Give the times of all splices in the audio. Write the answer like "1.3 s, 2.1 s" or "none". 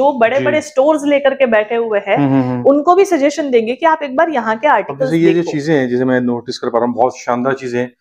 none